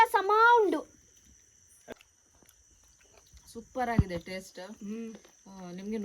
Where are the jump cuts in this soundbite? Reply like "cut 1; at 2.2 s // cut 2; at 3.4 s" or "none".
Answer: cut 1; at 1.9 s